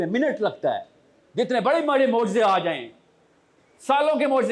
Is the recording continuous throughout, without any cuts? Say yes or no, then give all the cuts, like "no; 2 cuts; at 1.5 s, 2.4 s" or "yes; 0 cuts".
yes; 0 cuts